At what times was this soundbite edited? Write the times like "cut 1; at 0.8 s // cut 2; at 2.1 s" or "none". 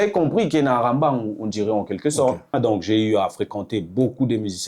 cut 1; at 2.5 s